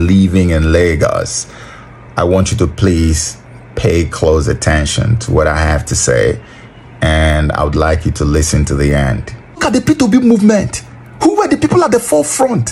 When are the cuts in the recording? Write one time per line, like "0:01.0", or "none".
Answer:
0:09.6

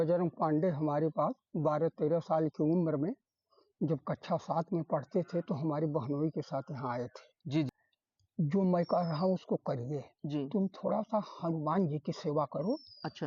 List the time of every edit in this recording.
0:07.7

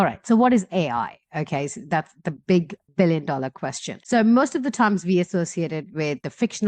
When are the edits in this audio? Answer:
none

